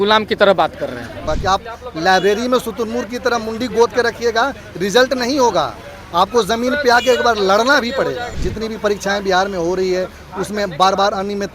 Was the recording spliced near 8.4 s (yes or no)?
yes